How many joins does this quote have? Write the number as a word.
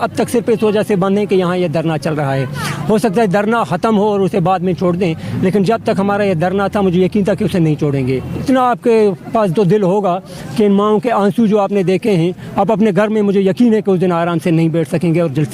one